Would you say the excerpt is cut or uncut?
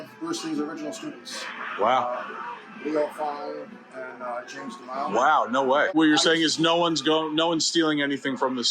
cut